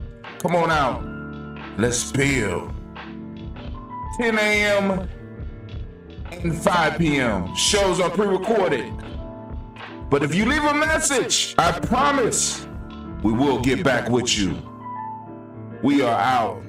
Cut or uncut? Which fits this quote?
uncut